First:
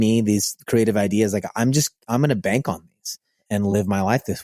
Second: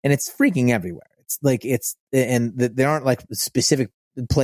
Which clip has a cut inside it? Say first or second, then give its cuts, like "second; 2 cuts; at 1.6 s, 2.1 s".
first; 1 cut; at 3.4 s